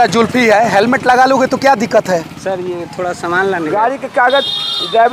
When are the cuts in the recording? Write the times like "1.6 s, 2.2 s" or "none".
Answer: 3.6 s